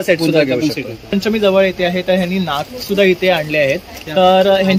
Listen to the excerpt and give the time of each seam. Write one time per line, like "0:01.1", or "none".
0:01.1